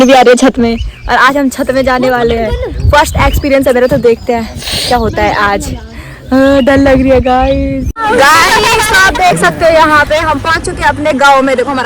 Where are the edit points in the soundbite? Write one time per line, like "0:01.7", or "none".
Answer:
0:08.0